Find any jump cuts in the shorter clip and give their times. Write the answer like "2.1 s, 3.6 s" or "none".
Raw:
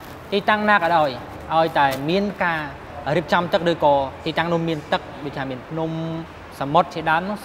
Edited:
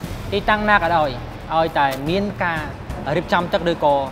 none